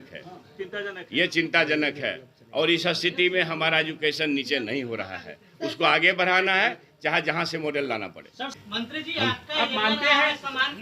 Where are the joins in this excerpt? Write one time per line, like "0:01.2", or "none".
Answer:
0:08.4